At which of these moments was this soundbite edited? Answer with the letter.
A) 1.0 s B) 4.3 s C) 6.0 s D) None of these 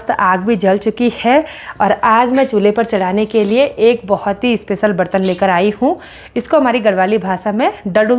D